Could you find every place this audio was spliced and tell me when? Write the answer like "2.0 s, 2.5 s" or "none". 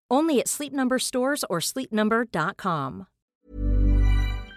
3.3 s